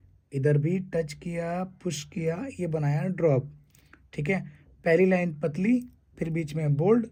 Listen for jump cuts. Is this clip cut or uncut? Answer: uncut